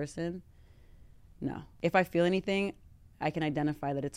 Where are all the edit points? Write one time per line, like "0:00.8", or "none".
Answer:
0:01.6